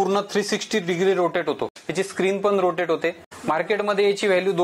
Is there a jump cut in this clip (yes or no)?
yes